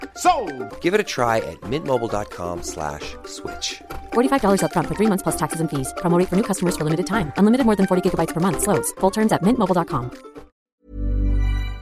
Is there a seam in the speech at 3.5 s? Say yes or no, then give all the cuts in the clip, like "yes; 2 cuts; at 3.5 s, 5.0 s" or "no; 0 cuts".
no; 1 cut; at 10.8 s